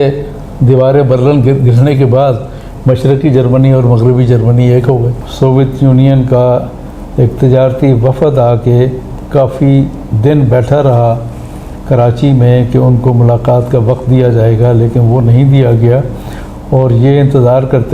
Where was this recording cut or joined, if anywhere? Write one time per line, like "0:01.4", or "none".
0:05.2